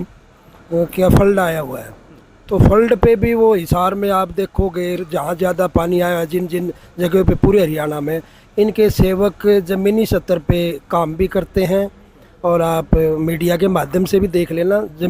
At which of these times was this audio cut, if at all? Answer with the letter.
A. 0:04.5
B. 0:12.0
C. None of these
C